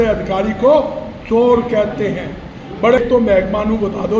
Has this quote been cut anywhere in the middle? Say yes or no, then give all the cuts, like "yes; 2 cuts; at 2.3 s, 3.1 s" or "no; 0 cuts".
yes; 1 cut; at 3.0 s